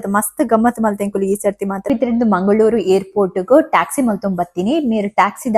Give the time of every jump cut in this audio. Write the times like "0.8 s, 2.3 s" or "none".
1.9 s